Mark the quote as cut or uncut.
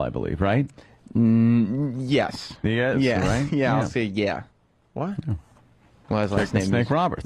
cut